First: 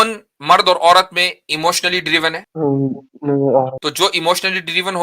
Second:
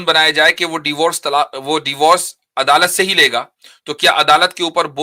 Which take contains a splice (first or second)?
first